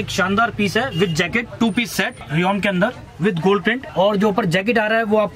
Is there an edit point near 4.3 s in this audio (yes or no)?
no